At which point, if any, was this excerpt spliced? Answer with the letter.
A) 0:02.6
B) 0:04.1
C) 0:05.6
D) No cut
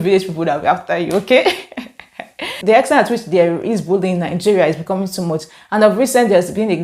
A